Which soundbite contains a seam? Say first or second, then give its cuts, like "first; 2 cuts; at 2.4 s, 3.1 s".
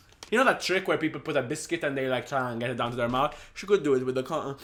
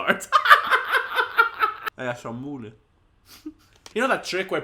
second; 1 cut; at 1.8 s